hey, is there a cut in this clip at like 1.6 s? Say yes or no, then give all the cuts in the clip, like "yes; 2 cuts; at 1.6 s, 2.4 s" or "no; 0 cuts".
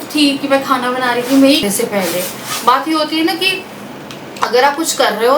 yes; 1 cut; at 1.6 s